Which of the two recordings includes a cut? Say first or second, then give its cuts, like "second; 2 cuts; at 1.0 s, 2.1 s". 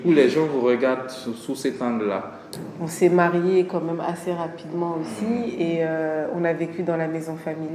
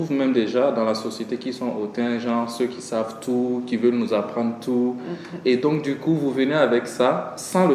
first; 1 cut; at 2.4 s